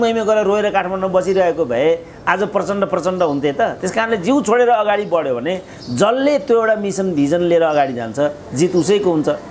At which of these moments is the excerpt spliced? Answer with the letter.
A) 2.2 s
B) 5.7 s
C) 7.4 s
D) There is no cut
D